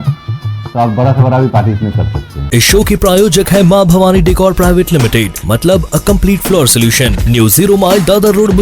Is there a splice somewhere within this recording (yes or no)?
no